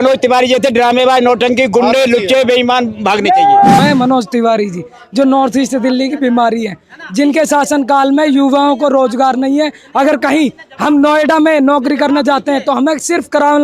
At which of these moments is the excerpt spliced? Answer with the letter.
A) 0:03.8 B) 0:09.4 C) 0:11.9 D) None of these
A